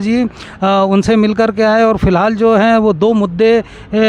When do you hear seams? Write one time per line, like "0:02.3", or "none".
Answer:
none